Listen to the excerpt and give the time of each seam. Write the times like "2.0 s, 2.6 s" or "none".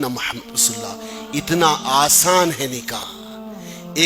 3.1 s